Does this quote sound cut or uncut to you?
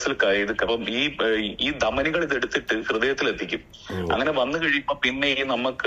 uncut